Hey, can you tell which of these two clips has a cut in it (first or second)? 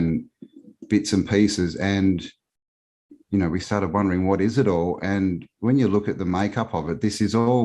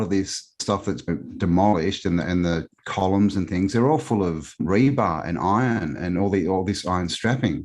second